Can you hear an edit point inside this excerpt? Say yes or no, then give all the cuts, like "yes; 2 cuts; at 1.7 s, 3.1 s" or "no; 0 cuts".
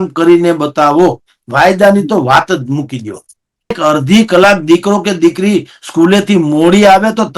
yes; 1 cut; at 3.8 s